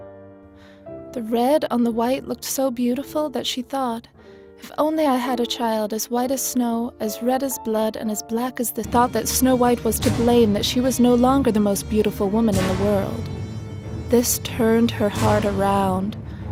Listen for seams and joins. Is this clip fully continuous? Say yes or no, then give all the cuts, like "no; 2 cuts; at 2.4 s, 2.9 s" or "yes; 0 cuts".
yes; 0 cuts